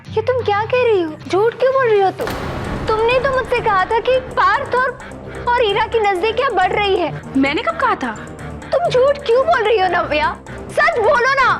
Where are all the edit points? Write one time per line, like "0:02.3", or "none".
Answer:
0:01.2
0:04.3
0:07.2

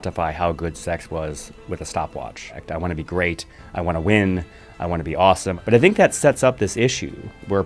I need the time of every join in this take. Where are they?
0:02.6
0:05.6

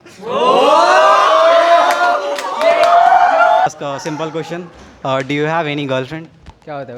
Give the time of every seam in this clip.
0:03.7

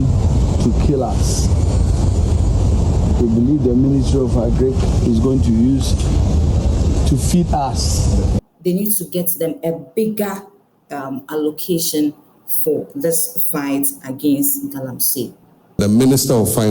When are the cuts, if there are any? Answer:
0:08.4
0:15.8

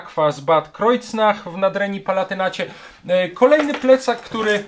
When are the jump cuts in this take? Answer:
none

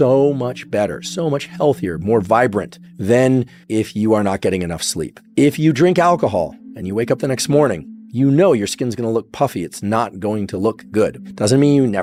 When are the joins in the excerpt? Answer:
none

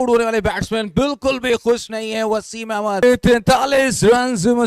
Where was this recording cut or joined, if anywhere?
0:03.0

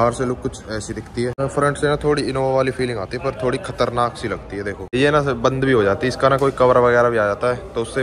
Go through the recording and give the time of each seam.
0:01.4
0:04.9

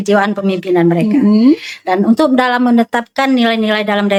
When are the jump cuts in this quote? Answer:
none

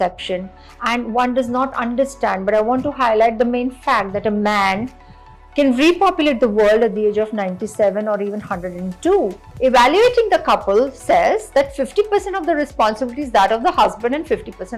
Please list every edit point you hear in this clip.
0:09.5

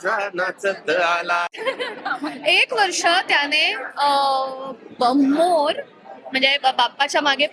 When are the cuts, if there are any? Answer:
0:01.6

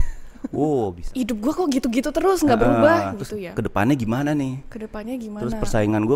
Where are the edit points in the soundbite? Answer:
0:01.0

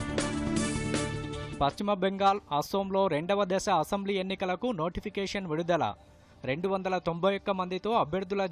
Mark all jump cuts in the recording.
0:01.2

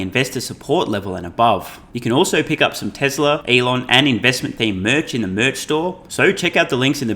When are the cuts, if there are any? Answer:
0:01.8
0:03.4
0:06.0

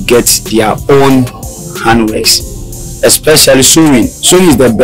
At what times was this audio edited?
none

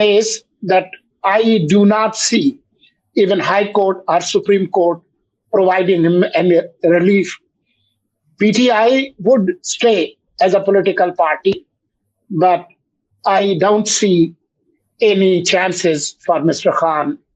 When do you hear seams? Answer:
none

